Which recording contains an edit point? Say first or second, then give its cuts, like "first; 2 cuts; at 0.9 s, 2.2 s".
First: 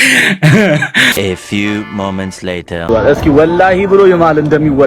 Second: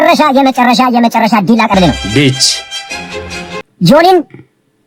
first; 1 cut; at 1.2 s